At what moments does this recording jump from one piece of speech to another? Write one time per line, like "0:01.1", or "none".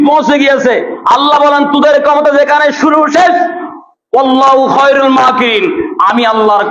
none